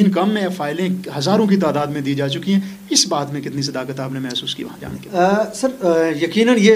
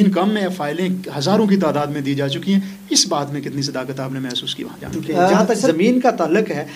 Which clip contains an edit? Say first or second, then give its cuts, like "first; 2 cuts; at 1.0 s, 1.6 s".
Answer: second; 1 cut; at 5.4 s